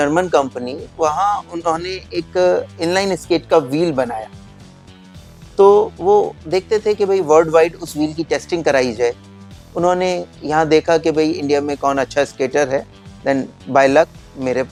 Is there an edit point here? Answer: no; 0 cuts

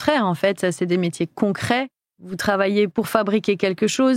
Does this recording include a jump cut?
no; 0 cuts

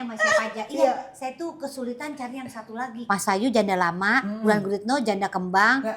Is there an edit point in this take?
yes; 1 cut; at 2.9 s

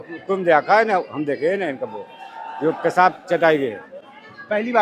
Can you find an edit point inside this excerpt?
no; 0 cuts

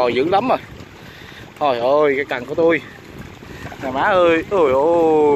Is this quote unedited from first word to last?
yes; 0 cuts

